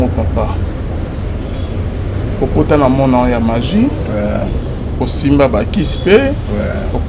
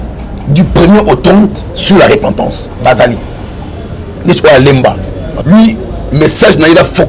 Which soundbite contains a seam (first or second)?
second